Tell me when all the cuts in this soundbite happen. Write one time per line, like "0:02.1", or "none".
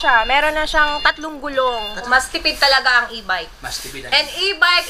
0:02.1